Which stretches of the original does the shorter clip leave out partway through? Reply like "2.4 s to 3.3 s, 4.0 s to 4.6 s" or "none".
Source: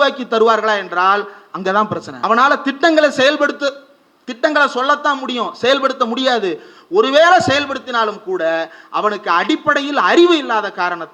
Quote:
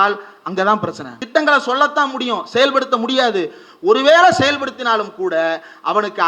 2.1 s to 4.1 s